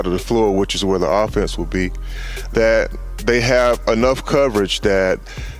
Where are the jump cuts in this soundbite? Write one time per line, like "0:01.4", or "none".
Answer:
none